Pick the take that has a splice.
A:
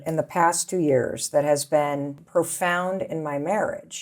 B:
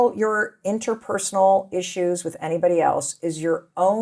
A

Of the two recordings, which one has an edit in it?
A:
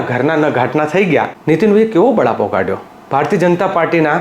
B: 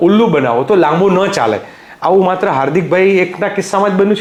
A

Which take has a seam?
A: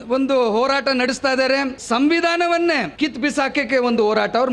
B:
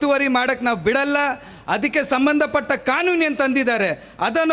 A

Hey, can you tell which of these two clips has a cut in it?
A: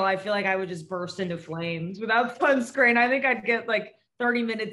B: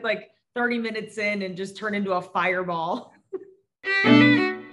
B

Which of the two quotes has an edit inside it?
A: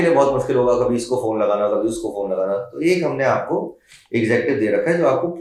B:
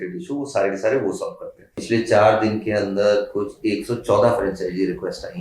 B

